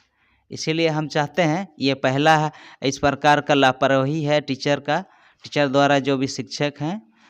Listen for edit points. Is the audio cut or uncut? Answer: uncut